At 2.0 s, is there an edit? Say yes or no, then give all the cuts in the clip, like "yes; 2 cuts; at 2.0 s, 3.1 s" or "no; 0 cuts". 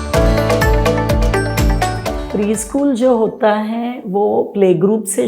yes; 1 cut; at 2.0 s